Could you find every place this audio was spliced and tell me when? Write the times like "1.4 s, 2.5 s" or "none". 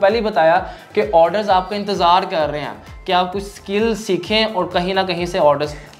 none